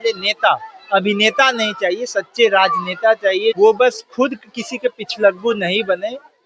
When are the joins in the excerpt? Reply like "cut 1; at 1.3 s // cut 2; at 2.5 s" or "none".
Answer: cut 1; at 3.6 s